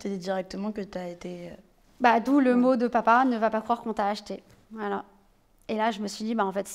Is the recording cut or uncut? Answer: uncut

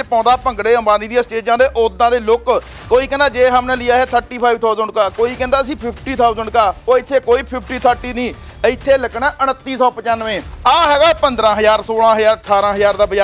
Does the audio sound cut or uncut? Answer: cut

